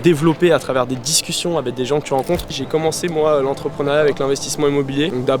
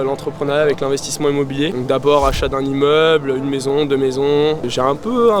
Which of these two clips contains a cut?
first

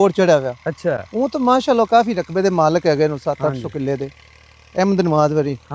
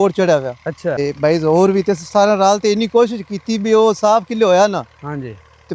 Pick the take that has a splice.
second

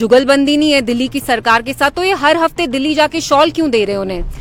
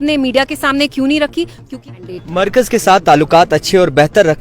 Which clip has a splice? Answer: second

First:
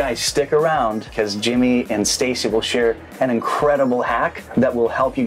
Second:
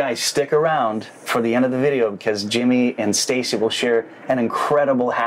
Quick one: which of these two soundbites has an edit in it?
first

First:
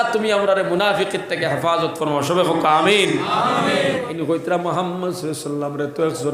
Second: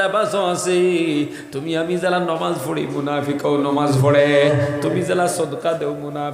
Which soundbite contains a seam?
first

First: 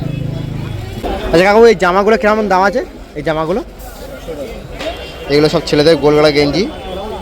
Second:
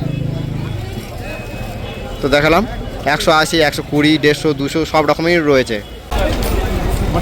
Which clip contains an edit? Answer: first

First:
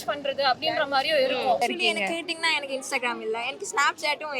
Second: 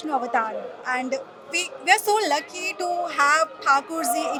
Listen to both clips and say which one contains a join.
first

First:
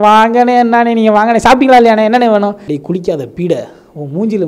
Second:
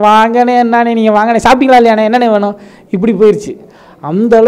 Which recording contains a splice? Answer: first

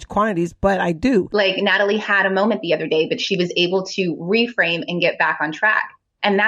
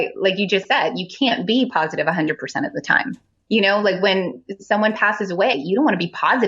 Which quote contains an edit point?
first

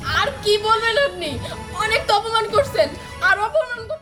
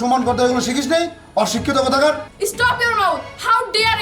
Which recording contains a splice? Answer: second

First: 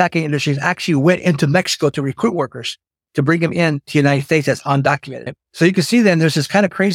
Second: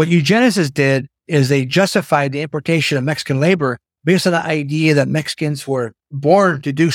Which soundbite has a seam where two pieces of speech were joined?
second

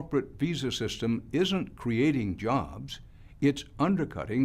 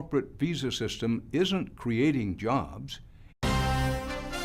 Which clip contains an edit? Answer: first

